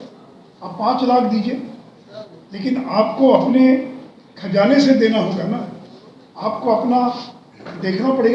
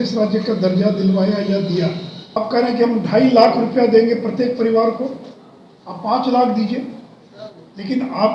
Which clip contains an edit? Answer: second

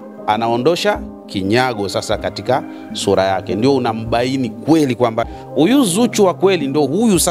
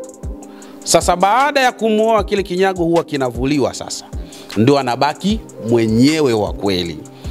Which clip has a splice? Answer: first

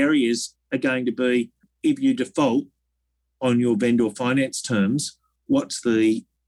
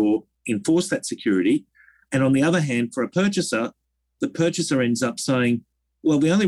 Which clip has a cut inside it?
first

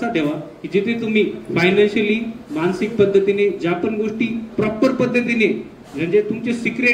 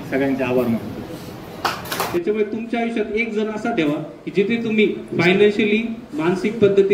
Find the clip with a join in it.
second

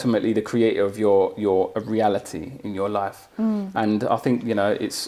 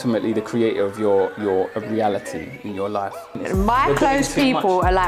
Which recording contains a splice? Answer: second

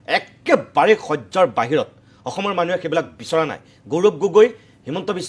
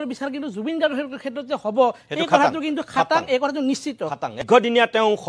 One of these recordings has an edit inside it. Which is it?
second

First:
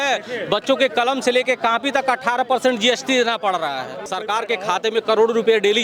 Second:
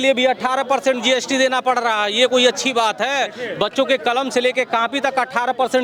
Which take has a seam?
first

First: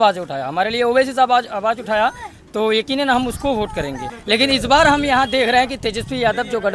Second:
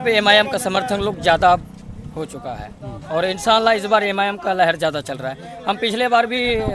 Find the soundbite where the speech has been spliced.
first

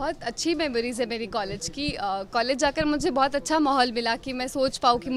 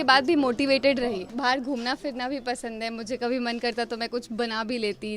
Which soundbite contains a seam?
second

